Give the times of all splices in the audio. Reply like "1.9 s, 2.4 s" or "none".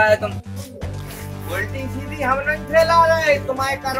none